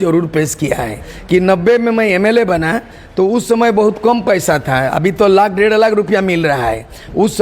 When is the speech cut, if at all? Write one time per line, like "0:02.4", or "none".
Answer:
0:01.1